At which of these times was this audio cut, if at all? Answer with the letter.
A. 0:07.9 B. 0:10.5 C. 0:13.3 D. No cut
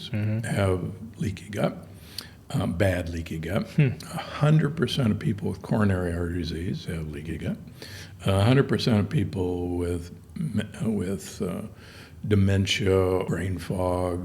C